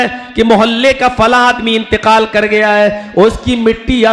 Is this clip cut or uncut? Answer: uncut